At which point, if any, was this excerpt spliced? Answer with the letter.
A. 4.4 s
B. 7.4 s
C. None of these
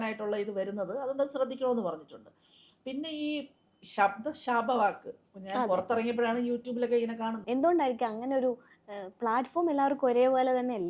B